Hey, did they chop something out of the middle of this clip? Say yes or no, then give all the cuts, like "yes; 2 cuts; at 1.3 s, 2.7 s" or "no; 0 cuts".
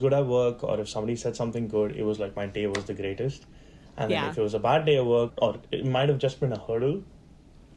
yes; 1 cut; at 5.3 s